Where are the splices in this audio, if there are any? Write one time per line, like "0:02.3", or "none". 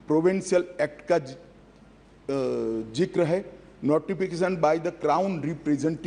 none